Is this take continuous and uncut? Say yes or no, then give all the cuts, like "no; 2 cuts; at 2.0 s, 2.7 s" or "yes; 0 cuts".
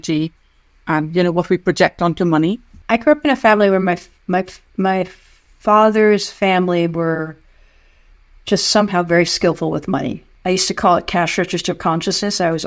no; 2 cuts; at 2.7 s, 10.2 s